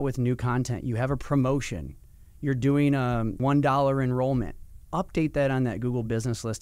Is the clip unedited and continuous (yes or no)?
no